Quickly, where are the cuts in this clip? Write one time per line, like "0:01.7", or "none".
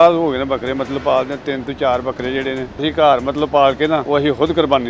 0:02.8
0:04.0